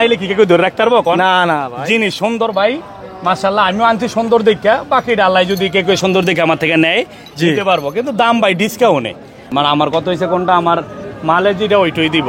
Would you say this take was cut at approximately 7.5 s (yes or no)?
no